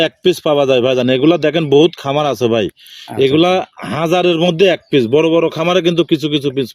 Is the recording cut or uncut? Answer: uncut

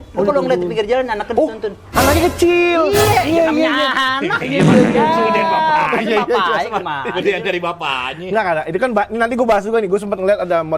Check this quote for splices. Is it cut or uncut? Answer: uncut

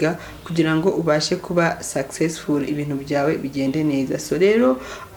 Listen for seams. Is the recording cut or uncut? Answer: uncut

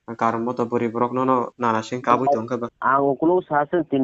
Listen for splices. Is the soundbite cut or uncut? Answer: cut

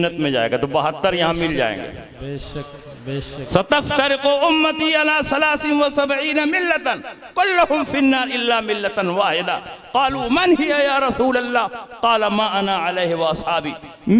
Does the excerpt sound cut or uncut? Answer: uncut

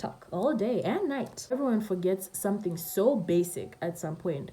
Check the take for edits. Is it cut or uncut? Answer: cut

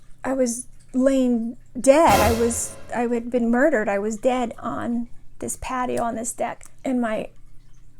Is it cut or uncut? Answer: cut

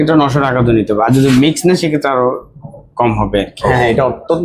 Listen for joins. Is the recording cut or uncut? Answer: cut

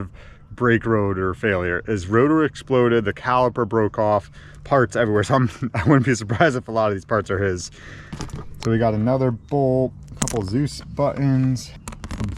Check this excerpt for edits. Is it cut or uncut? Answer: uncut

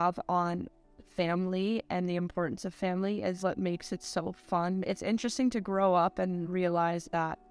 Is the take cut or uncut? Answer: cut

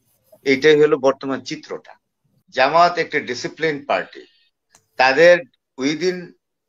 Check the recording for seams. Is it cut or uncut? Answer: cut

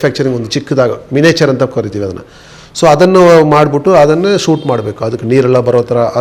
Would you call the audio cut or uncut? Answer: uncut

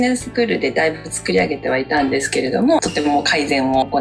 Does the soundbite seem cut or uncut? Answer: cut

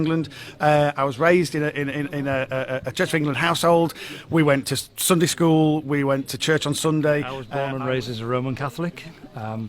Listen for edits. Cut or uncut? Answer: cut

